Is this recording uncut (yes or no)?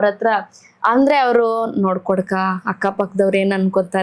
yes